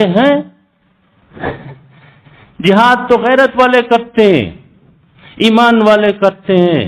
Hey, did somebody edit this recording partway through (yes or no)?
no